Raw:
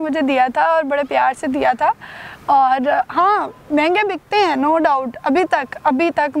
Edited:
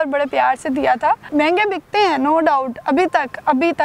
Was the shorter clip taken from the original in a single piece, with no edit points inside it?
no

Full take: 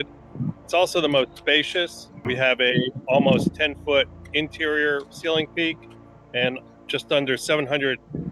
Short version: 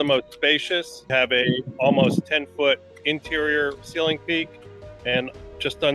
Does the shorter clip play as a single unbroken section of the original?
no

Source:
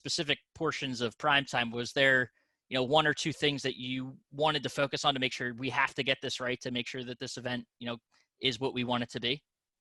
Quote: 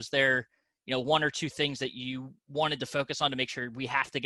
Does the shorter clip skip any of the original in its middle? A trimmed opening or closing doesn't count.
no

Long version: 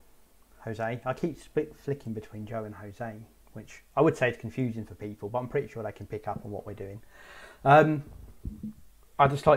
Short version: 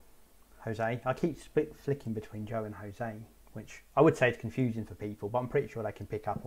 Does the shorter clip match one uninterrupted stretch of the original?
yes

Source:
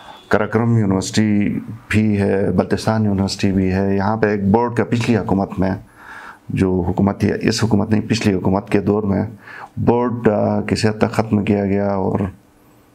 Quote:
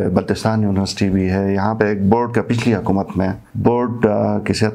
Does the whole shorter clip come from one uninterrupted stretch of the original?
no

